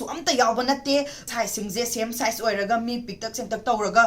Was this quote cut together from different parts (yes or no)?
yes